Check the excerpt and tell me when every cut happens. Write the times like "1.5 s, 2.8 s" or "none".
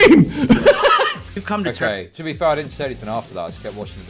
1.3 s